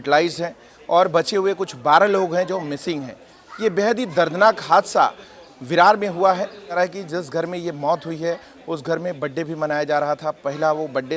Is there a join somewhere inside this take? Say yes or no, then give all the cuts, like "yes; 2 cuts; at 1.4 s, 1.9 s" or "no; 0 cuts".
yes; 1 cut; at 6.8 s